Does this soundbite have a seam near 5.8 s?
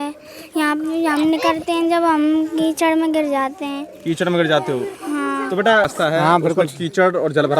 yes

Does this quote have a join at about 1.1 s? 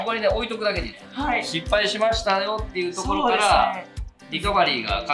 yes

